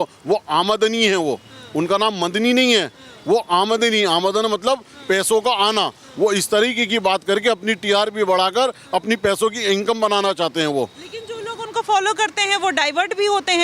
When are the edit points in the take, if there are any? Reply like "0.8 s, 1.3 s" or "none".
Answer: none